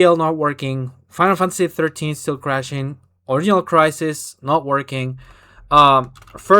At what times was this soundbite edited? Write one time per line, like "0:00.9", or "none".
none